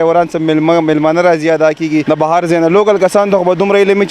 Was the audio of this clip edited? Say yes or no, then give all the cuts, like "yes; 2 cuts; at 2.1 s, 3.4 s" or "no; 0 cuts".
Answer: yes; 1 cut; at 2.0 s